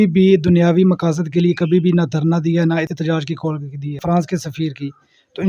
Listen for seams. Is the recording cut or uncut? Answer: cut